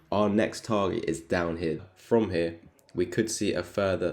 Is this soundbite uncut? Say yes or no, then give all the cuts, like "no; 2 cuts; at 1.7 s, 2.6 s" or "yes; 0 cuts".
no; 1 cut; at 1.8 s